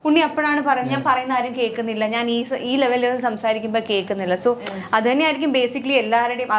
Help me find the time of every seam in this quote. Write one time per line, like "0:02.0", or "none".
none